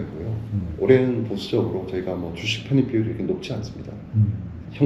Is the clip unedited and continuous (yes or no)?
yes